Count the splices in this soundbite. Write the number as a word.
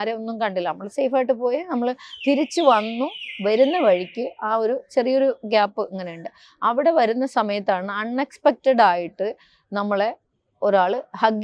zero